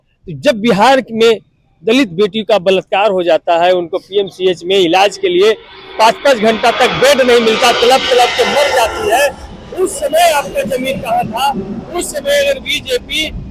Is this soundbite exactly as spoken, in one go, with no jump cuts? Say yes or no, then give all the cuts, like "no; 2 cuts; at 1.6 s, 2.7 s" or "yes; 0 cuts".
yes; 0 cuts